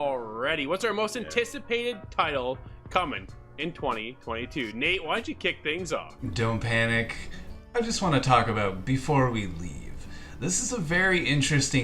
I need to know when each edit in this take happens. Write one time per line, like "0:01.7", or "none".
0:06.1